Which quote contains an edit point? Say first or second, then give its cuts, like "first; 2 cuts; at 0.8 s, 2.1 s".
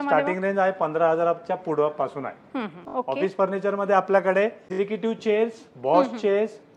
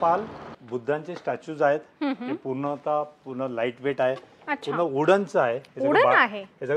first; 2 cuts; at 2.8 s, 4.6 s